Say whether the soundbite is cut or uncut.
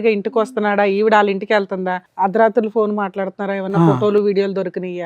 cut